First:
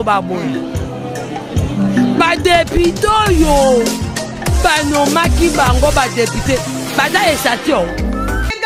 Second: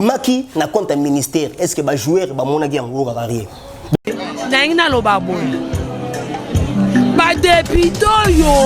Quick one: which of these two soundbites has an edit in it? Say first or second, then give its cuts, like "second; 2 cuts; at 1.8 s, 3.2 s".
second; 1 cut; at 4.0 s